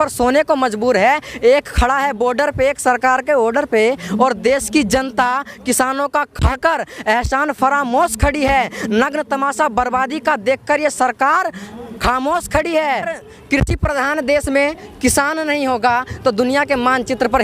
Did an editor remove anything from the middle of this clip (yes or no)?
yes